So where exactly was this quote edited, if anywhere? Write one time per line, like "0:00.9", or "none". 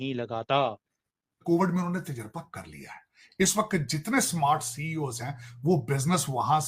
0:01.3